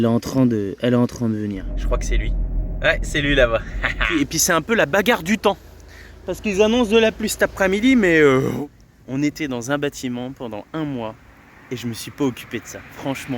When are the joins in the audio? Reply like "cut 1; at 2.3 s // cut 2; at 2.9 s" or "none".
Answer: cut 1; at 1.7 s // cut 2; at 4.1 s // cut 3; at 8.5 s